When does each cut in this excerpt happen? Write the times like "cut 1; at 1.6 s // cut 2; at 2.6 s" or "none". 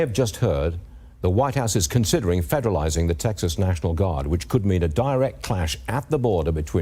none